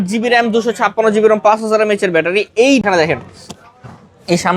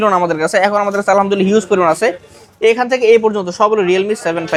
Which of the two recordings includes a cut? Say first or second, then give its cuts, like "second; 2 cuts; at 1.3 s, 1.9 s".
first; 1 cut; at 2.8 s